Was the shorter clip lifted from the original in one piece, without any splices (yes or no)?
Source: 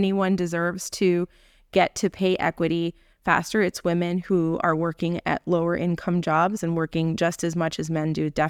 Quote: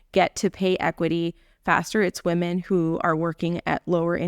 yes